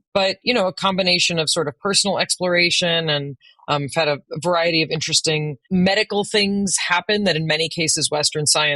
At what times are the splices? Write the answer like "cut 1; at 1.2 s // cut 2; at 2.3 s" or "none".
cut 1; at 5.6 s